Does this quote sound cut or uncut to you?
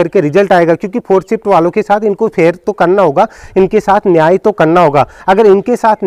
uncut